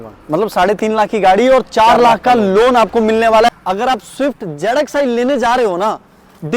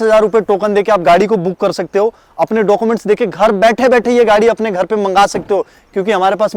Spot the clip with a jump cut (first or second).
first